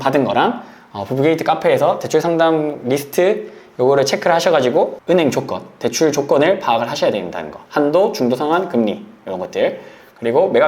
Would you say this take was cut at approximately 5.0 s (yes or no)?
yes